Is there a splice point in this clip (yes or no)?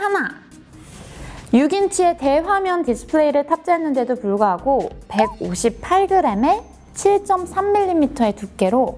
yes